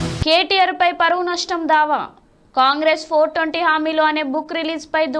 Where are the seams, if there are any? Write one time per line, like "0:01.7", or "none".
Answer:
none

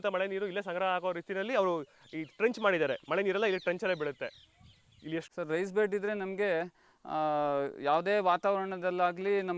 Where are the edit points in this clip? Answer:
0:05.3

